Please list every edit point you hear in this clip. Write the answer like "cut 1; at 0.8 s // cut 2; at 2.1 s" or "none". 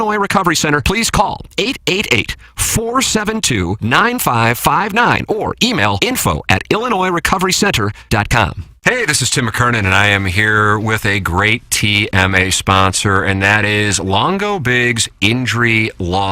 cut 1; at 8.7 s